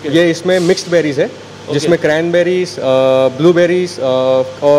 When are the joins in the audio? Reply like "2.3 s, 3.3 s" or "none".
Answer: none